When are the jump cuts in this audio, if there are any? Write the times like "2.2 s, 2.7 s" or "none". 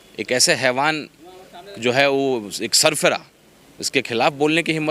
none